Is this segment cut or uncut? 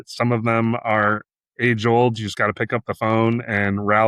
uncut